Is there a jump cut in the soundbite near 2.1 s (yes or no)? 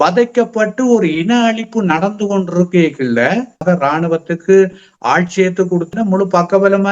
no